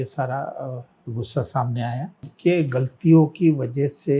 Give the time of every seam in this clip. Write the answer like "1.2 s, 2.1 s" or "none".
2.3 s